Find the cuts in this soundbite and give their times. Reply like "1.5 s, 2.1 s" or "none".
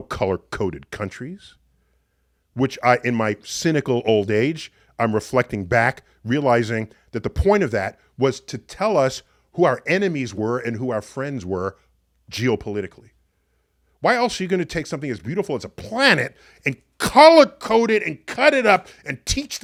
none